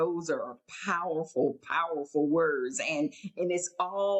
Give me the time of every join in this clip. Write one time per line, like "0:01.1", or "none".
none